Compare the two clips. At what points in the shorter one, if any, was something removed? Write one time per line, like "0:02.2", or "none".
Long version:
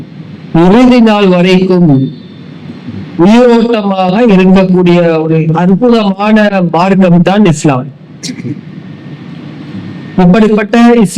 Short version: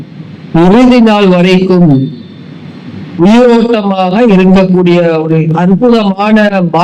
none